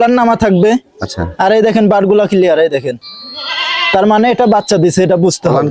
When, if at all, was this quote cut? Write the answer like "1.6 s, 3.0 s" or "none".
none

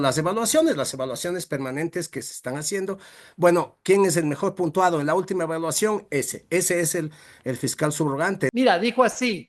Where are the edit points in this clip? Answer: 8.5 s

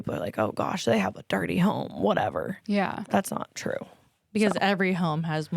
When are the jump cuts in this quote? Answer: 3.0 s

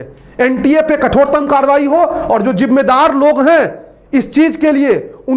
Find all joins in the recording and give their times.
none

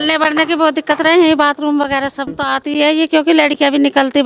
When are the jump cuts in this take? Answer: 2.3 s

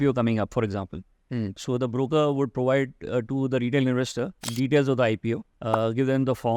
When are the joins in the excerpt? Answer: 5.5 s

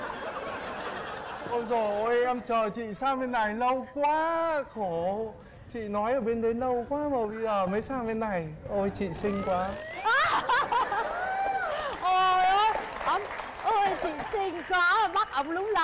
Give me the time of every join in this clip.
none

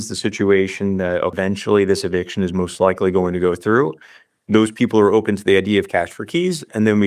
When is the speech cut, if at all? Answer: 1.4 s

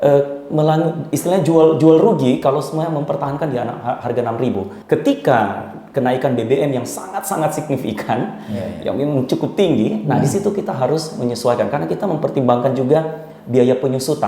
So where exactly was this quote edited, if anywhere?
4.8 s

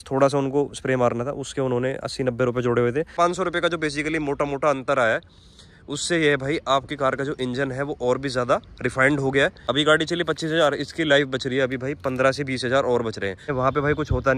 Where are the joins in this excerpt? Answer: 3.1 s, 9.6 s, 13.5 s

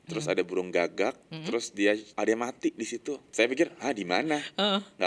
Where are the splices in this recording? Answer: 2.1 s, 3.2 s

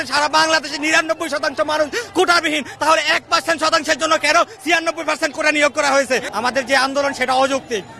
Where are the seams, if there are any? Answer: 6.3 s

